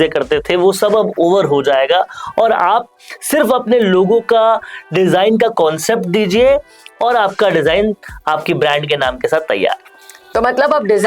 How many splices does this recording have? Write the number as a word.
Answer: zero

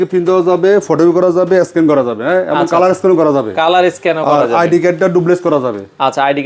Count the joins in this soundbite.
zero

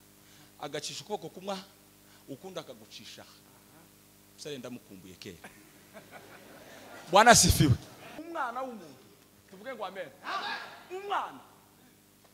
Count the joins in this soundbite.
one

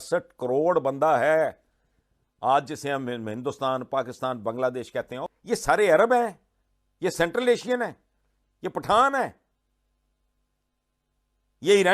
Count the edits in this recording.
one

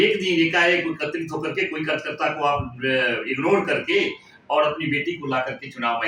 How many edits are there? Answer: zero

